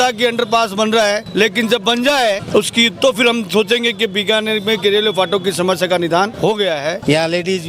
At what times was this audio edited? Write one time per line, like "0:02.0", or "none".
0:01.2
0:02.4
0:06.6